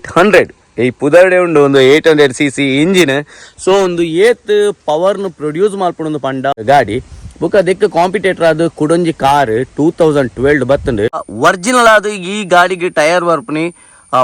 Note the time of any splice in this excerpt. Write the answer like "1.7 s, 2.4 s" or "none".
6.6 s, 11.3 s